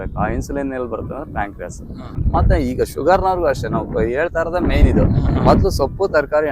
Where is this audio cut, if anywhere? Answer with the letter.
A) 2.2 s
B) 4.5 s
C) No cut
A